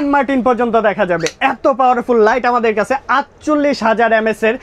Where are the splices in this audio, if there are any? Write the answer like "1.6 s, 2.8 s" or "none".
none